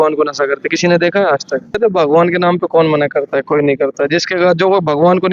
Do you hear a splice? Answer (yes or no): yes